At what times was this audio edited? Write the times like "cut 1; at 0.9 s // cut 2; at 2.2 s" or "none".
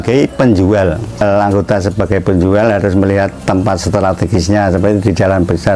cut 1; at 1.2 s